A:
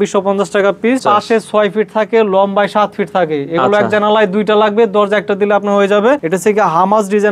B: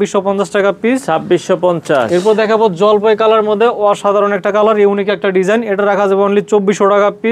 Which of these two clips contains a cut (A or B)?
A